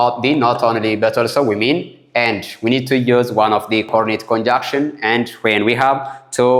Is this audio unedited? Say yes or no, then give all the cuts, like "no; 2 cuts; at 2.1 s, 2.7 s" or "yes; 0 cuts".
yes; 0 cuts